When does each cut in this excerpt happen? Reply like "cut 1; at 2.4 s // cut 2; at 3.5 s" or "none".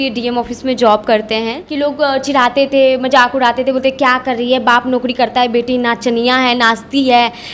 cut 1; at 1.6 s